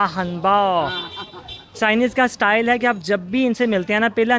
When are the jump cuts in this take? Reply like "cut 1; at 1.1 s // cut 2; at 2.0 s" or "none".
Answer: none